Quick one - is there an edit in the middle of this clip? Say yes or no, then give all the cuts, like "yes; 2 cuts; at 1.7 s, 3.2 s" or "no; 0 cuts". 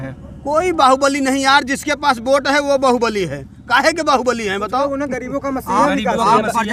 no; 0 cuts